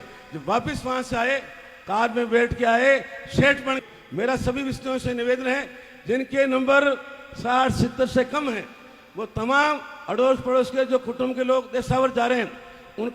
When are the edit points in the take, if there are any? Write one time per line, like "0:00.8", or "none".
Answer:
0:03.8